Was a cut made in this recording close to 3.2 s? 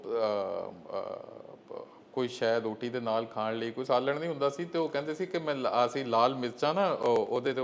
no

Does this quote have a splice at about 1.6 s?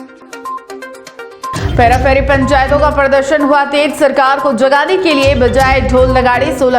yes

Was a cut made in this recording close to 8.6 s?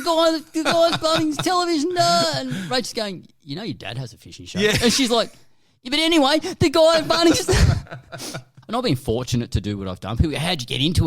yes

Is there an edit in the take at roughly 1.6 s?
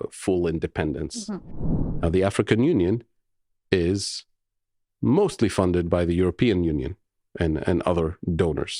yes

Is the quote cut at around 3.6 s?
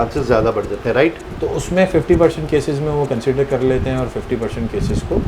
no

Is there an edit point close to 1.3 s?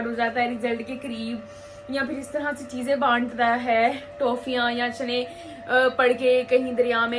no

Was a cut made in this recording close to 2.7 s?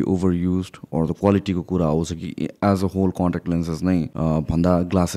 no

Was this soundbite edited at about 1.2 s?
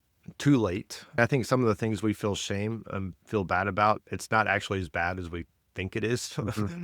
yes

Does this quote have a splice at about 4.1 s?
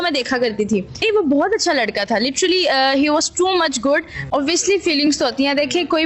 yes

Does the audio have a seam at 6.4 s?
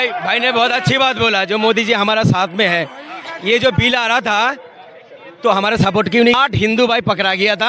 yes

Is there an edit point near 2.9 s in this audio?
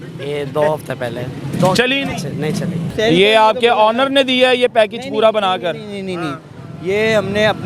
yes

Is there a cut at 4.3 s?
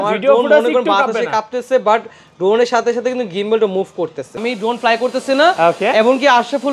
yes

